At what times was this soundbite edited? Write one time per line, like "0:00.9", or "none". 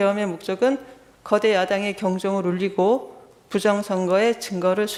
none